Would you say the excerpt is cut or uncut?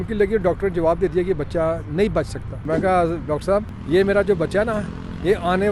cut